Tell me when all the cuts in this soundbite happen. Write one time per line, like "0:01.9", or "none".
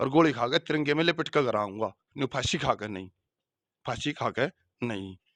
none